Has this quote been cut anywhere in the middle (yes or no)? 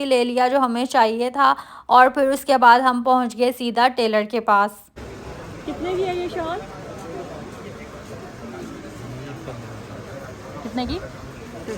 no